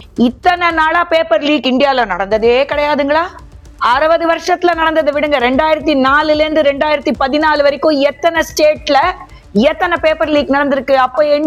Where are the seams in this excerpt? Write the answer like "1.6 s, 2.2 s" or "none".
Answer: none